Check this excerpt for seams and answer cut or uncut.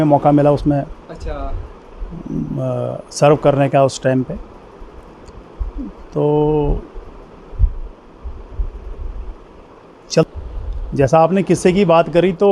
cut